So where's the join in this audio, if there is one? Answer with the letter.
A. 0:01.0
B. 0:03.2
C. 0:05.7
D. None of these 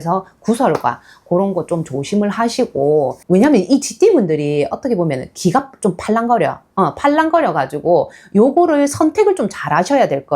B